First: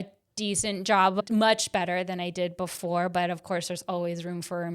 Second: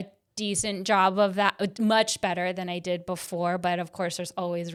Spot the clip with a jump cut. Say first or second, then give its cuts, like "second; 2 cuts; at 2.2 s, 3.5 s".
first; 1 cut; at 1.2 s